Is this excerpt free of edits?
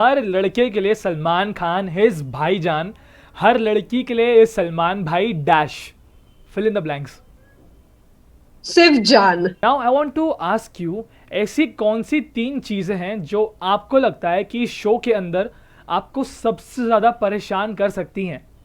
no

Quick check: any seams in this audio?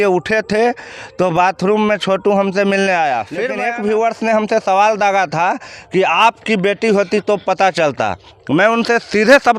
yes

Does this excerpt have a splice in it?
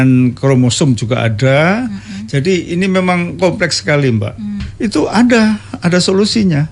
yes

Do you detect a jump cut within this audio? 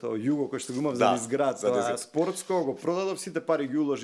no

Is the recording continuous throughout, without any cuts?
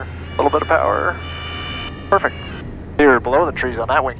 no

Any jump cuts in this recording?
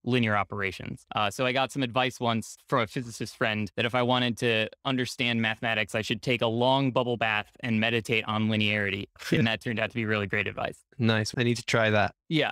no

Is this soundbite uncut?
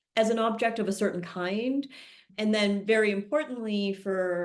yes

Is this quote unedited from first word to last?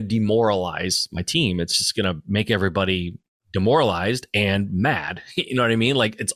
yes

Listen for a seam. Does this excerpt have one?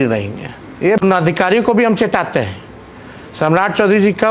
yes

